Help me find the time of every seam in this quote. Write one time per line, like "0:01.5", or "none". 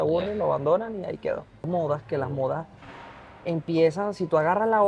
0:01.6